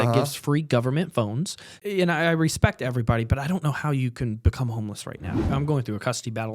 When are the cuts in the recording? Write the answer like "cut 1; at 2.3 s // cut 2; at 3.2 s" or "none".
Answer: cut 1; at 1.8 s // cut 2; at 5.5 s